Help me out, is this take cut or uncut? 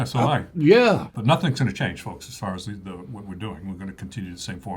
cut